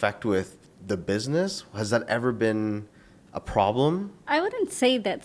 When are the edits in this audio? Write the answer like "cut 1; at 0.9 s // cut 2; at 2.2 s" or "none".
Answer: cut 1; at 4.2 s